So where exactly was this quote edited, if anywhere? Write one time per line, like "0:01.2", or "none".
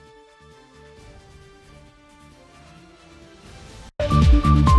0:03.8